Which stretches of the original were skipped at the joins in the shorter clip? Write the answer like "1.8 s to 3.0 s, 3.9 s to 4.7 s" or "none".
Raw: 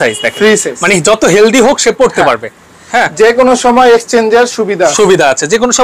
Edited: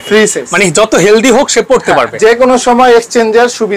2.4 s to 3.1 s